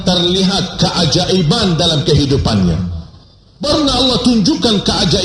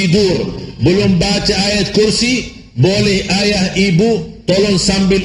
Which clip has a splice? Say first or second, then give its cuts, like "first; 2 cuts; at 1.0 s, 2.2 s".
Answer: first; 1 cut; at 3.7 s